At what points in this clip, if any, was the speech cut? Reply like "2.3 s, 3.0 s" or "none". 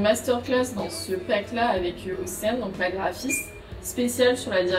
none